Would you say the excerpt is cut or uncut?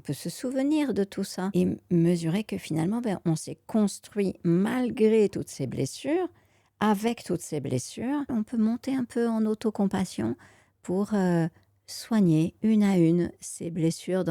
cut